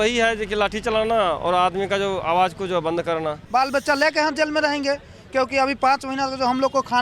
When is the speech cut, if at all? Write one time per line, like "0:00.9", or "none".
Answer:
0:03.4